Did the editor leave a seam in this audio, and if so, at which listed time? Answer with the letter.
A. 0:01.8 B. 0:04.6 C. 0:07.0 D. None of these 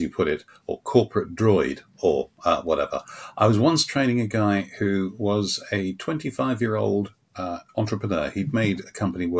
D